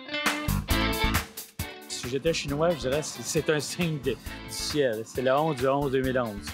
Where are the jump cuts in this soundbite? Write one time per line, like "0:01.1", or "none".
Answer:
0:02.0